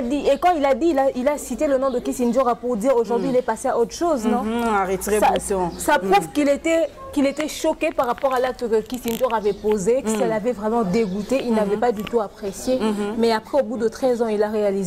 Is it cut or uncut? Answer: uncut